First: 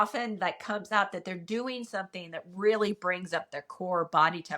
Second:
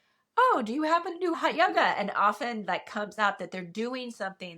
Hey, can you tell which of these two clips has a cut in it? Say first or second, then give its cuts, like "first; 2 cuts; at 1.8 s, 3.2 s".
second; 1 cut; at 1.3 s